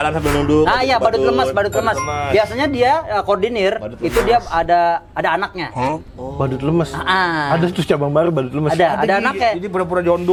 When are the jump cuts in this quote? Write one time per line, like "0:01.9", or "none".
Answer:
none